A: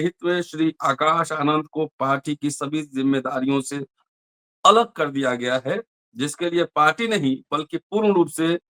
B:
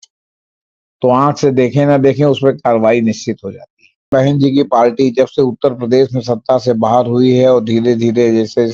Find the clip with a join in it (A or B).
B